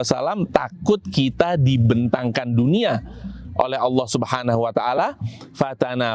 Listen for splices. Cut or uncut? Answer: uncut